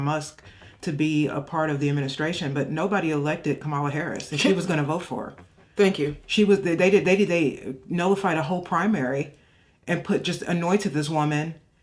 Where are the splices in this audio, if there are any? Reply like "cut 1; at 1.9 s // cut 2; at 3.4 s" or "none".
none